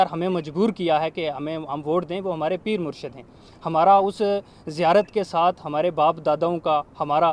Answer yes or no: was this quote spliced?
no